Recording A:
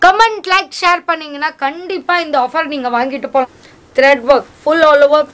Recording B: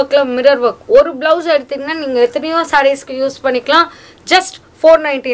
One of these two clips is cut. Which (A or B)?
A